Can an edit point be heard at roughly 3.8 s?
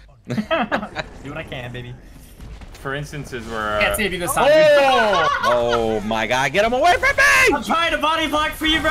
no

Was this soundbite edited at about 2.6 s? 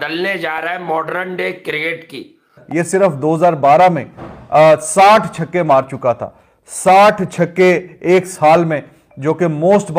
yes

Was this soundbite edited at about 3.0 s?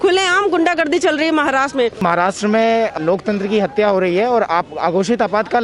yes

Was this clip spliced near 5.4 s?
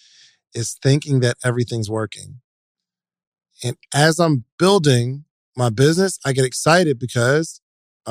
no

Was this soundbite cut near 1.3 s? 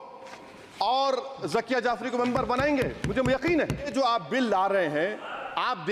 no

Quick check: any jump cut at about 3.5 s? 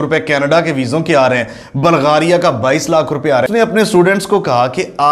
yes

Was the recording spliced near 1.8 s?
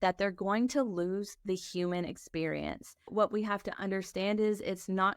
no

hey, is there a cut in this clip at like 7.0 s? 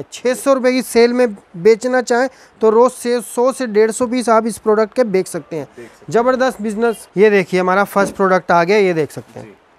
yes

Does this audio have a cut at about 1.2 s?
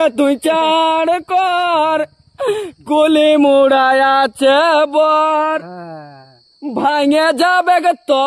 no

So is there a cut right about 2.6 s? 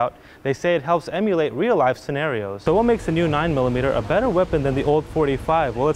yes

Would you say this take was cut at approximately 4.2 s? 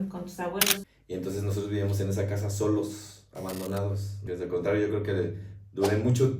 yes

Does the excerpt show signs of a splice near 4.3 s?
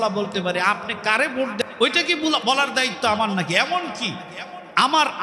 no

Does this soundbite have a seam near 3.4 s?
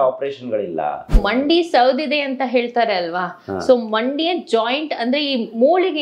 no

